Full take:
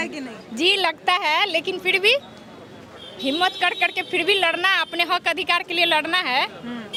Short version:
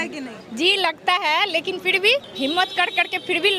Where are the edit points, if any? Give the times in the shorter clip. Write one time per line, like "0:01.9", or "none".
0:02.3